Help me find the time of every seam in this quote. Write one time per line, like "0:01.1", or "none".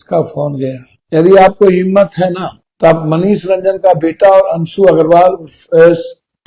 0:01.0